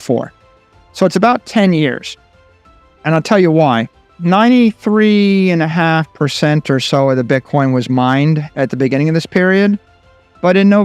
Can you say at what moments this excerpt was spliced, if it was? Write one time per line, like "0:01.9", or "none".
0:04.1